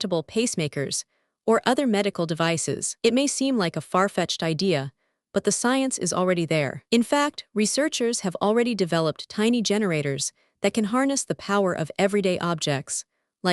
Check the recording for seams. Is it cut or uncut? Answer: uncut